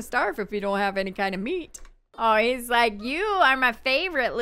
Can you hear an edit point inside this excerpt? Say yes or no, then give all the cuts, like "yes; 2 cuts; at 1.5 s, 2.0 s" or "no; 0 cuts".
yes; 1 cut; at 2.1 s